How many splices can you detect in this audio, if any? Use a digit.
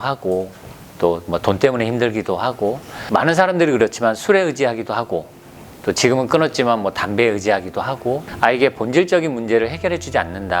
2